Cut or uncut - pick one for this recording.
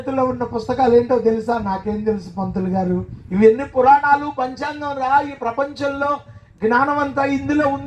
cut